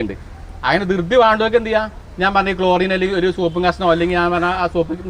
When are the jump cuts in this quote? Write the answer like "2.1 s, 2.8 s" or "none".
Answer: none

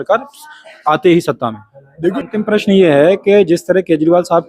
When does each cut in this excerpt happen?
2.2 s

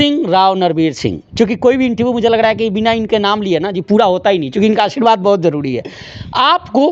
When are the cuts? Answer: none

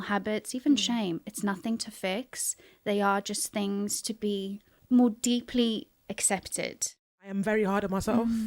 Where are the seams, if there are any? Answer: 4.7 s, 7.3 s

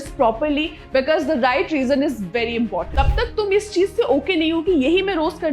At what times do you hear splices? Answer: 2.9 s

